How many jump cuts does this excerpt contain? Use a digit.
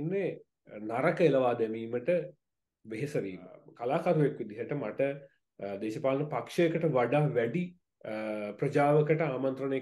1